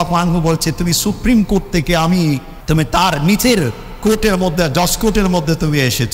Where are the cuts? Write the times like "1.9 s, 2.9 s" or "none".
2.5 s